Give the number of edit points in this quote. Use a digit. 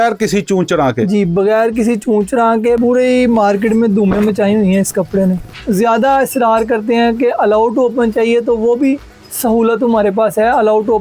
2